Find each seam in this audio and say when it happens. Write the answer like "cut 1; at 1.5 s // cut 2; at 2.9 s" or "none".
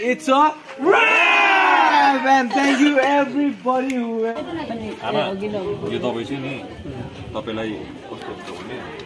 cut 1; at 4.3 s